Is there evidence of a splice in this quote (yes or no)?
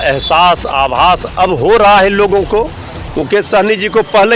no